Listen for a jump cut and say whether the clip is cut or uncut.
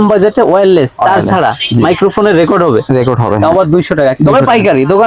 uncut